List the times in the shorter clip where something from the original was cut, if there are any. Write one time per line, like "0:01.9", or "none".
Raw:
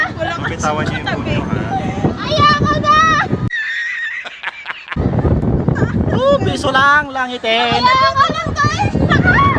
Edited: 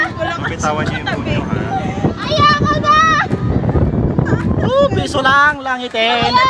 0:03.4